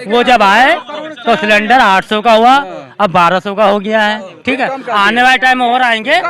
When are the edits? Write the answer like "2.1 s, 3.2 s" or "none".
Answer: none

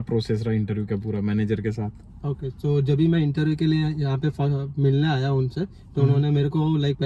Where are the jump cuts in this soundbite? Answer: none

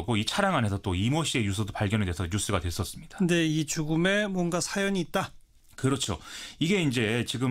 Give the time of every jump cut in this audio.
none

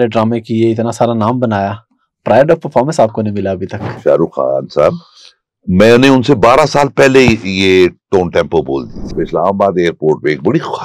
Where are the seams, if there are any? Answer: 4.0 s, 9.1 s

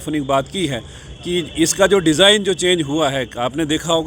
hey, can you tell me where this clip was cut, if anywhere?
none

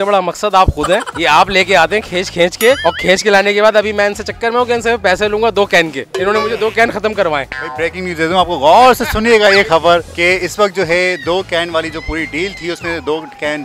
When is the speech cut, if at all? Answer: none

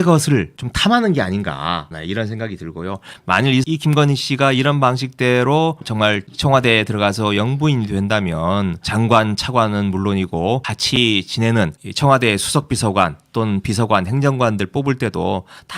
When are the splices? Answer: 1.9 s, 8.8 s

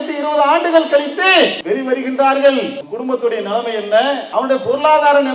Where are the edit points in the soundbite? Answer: 1.6 s, 2.8 s, 4.2 s

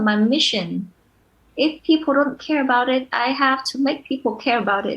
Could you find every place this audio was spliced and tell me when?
none

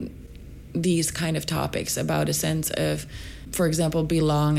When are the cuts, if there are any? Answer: 3.5 s

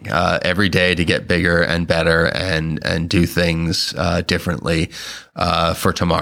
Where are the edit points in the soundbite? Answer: none

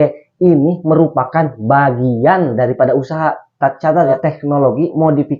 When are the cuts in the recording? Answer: 4.1 s

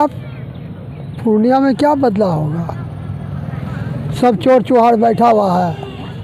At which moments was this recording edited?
none

